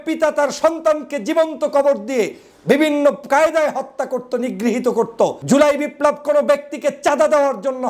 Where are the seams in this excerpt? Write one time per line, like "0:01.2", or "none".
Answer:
0:05.4

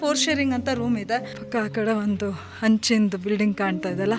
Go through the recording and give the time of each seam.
0:01.4

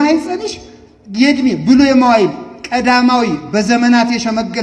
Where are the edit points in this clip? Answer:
none

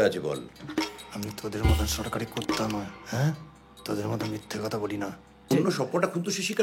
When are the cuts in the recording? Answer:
0:05.5

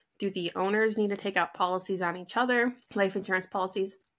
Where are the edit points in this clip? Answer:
0:02.8

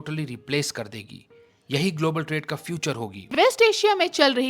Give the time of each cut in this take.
0:03.3

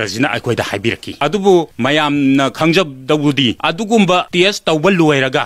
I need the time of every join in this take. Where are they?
0:01.1
0:01.7
0:03.6
0:04.3

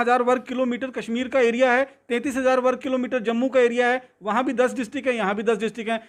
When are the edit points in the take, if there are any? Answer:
none

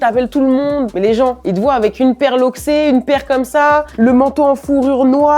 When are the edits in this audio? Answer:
0:00.9
0:03.9

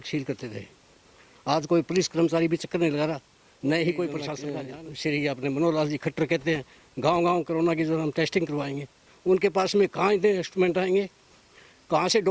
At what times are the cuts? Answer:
0:04.3

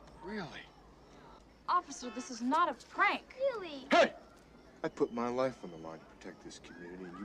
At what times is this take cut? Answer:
0:01.5

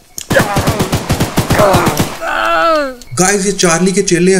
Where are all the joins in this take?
0:03.0

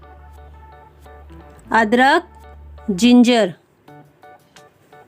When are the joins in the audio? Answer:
0:01.6

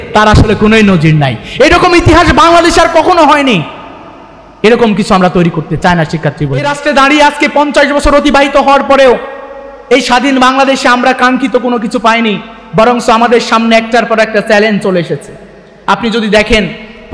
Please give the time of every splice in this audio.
0:06.7

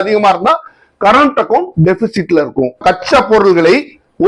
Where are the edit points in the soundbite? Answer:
0:02.8

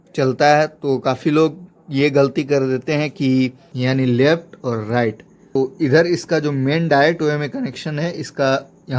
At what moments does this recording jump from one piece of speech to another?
0:03.7
0:05.6

